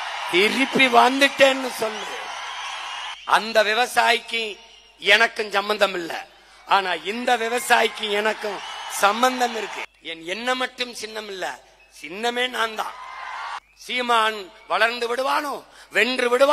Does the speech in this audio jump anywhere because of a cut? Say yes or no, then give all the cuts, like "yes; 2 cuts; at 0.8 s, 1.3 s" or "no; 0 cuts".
yes; 3 cuts; at 3.1 s, 9.8 s, 13.6 s